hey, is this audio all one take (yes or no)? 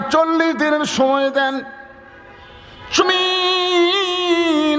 no